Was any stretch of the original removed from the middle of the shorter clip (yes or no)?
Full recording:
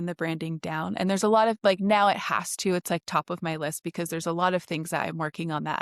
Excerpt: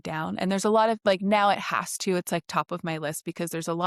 no